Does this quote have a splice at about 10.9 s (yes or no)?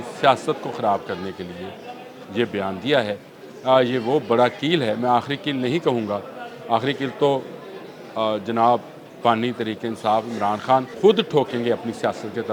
yes